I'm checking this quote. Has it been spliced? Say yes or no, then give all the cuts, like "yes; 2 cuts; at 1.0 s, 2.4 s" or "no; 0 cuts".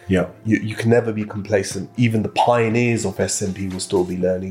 yes; 1 cut; at 1.8 s